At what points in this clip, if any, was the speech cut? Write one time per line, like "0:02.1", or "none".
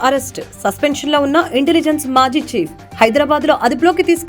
none